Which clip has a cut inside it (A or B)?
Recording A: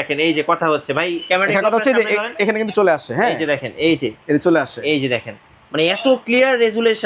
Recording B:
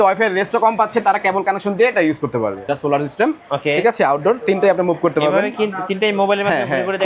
B